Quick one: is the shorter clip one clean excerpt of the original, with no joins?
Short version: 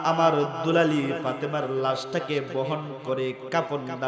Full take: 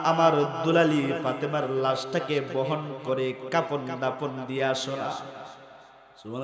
yes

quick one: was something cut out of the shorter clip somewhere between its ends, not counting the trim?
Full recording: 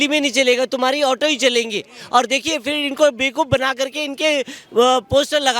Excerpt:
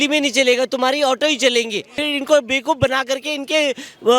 yes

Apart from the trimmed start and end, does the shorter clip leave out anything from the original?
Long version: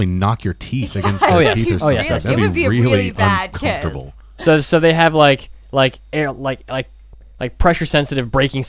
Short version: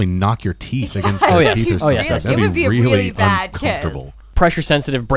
yes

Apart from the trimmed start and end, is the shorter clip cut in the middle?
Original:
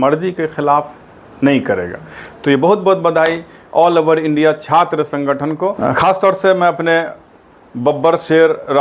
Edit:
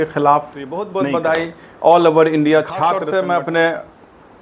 yes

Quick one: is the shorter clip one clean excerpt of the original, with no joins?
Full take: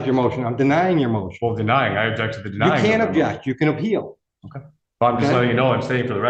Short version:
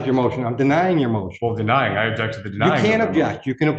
yes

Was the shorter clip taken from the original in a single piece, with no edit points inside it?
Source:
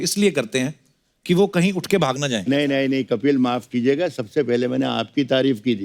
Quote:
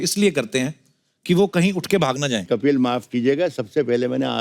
no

